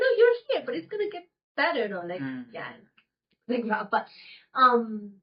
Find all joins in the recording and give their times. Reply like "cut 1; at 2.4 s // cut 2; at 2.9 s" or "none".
none